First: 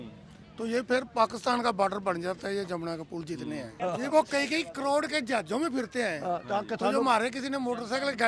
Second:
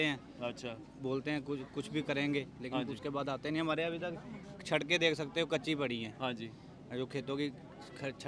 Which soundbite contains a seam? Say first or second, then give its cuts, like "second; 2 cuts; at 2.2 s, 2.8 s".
first; 1 cut; at 3.8 s